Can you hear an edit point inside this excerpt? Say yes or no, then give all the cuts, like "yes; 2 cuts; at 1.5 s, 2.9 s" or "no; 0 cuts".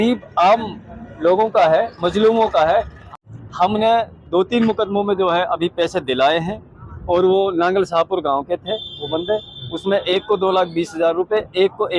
yes; 1 cut; at 3.0 s